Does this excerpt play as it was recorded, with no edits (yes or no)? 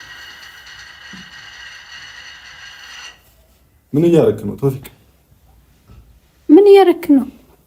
yes